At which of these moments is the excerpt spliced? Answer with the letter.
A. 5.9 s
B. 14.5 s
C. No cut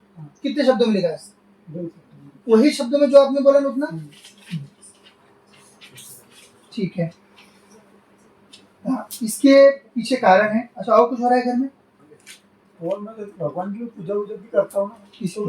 C